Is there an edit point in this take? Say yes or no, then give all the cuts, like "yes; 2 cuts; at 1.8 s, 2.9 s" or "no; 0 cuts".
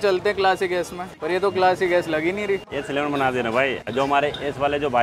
yes; 2 cuts; at 1.1 s, 2.7 s